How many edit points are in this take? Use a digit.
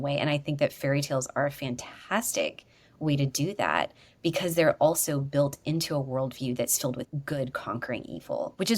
1